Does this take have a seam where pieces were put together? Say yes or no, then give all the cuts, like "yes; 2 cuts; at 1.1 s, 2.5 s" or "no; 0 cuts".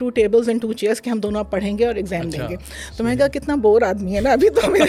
no; 0 cuts